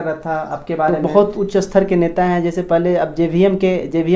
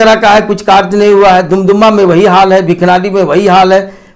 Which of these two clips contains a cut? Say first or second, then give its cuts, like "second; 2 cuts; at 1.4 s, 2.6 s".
first; 1 cut; at 1.0 s